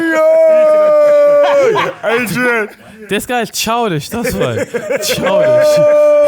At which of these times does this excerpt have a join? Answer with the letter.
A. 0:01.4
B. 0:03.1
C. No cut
B